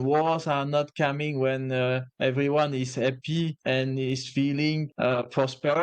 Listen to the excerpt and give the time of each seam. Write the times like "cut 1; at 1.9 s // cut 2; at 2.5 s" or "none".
cut 1; at 2.1 s // cut 2; at 3.6 s // cut 3; at 4.9 s